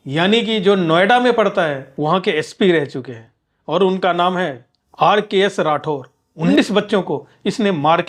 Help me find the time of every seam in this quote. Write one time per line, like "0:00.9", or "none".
0:01.9
0:06.4